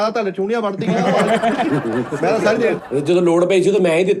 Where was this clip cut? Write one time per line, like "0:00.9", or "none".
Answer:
0:02.8